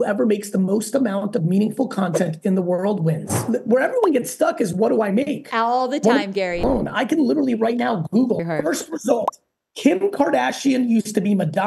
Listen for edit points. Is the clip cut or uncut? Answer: cut